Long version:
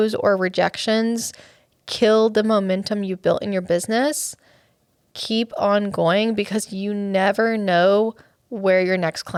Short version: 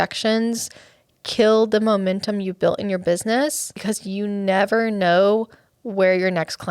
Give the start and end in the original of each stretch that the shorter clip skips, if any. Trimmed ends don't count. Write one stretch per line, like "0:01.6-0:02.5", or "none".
0:04.4-0:06.5